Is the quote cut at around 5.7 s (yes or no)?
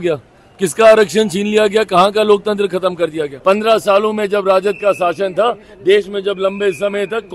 no